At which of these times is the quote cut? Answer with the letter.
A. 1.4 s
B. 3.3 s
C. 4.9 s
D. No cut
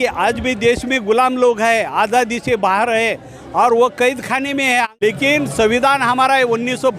C